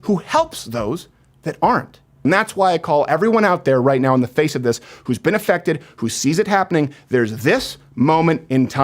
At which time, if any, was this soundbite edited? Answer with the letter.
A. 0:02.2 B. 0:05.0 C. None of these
A